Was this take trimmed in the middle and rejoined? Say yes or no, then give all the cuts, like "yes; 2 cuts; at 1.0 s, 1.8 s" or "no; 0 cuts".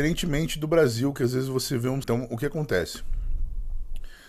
yes; 1 cut; at 2.0 s